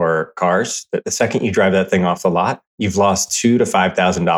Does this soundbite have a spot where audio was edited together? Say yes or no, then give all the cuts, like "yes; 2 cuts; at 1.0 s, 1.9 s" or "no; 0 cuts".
yes; 1 cut; at 1.0 s